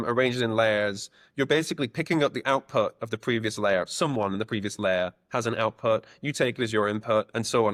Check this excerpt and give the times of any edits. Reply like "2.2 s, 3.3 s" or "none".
none